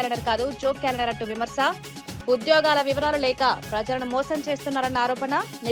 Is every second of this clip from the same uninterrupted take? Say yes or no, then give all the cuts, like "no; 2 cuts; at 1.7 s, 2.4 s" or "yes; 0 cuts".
yes; 0 cuts